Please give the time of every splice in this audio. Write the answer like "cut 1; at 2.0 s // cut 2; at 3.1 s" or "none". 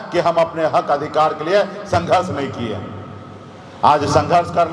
none